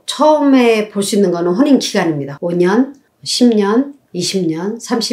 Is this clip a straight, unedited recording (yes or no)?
no